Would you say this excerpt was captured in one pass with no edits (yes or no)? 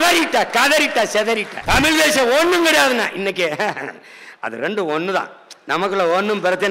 no